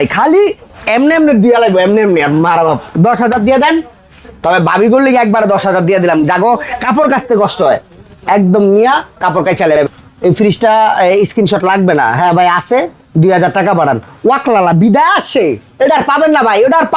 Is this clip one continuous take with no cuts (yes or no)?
no